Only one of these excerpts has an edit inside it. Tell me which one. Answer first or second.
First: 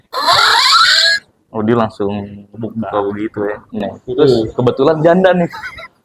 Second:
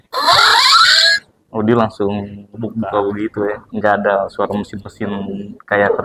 first